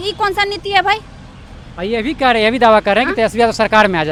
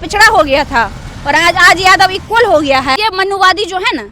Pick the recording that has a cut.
second; 1 cut; at 3.0 s

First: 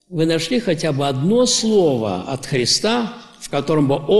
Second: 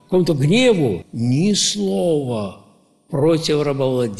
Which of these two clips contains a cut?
second; 1 cut; at 1.1 s

